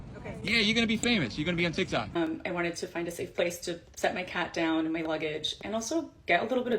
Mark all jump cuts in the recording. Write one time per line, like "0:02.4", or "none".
0:02.1

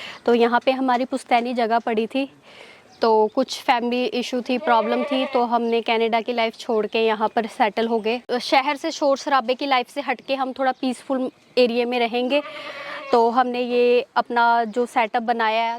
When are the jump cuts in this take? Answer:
0:08.2

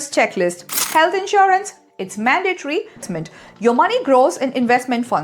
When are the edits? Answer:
0:03.0

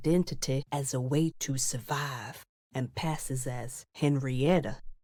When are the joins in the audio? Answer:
none

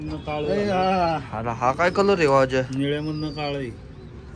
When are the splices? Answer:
none

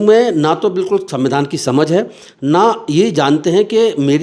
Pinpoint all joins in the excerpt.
none

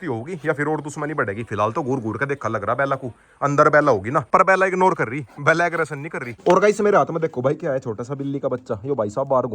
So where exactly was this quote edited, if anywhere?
0:04.3
0:06.3

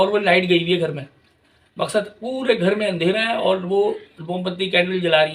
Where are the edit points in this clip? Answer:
none

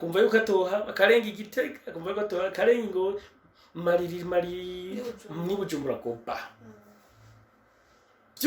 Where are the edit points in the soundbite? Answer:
none

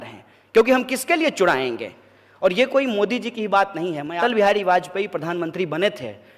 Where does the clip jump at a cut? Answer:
0:04.2

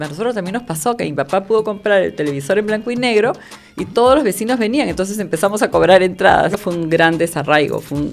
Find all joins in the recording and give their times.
0:06.6

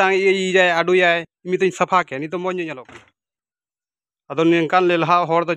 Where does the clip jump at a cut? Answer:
0:02.9

